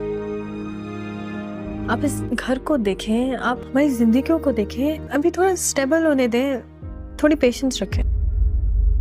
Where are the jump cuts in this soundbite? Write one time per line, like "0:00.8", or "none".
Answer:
0:01.6